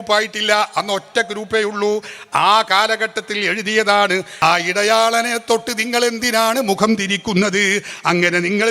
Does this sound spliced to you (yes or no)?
yes